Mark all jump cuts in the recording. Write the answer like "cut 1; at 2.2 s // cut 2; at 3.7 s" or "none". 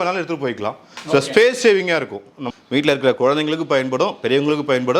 cut 1; at 2.5 s